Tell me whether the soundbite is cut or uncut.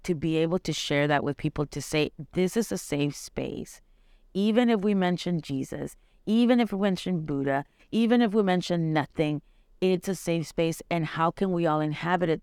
uncut